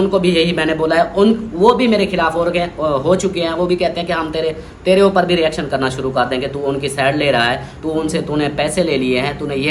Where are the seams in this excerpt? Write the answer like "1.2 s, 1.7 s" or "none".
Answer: none